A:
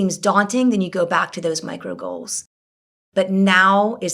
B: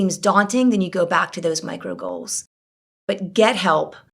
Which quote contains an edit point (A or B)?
A